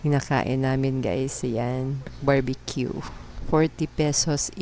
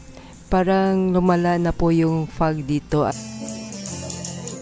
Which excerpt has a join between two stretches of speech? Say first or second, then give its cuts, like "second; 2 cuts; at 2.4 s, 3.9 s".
second; 1 cut; at 3.1 s